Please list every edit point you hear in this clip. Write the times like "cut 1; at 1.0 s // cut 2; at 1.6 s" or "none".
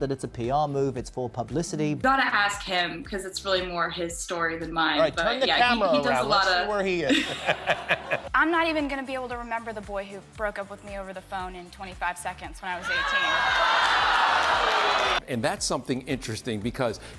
cut 1; at 2.0 s // cut 2; at 8.3 s // cut 3; at 15.2 s